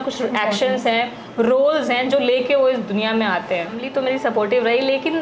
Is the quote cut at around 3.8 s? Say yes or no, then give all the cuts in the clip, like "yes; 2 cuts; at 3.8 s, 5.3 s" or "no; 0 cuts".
yes; 1 cut; at 3.8 s